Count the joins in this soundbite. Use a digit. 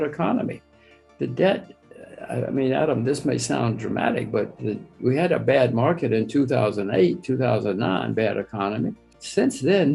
0